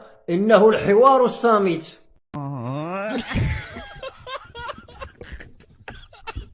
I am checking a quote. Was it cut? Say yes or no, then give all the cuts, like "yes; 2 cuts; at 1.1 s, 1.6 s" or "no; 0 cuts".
yes; 1 cut; at 2.2 s